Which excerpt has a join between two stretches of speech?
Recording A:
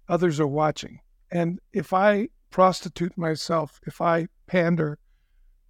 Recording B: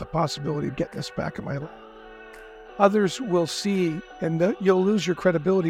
A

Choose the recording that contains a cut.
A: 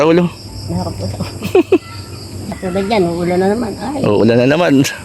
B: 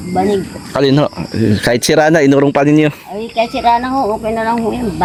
A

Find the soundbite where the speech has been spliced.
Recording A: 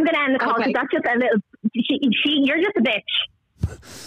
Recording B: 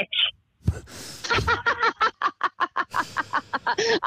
B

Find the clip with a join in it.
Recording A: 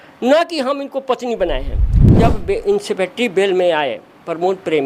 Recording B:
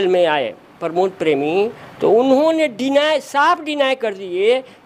A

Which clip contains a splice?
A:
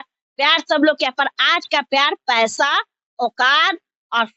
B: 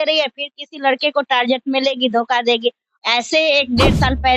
B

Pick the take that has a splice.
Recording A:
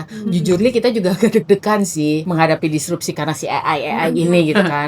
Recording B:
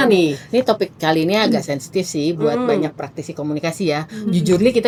A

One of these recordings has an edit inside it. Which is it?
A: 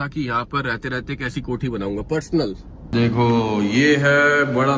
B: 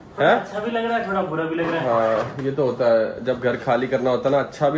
A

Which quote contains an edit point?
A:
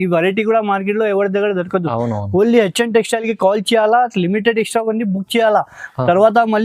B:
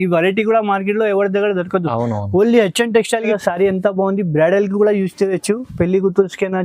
B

